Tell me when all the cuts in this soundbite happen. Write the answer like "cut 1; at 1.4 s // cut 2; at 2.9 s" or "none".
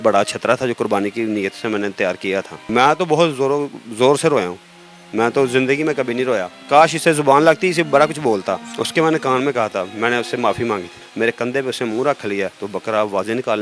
cut 1; at 2.6 s // cut 2; at 6.5 s // cut 3; at 8.7 s // cut 4; at 11.0 s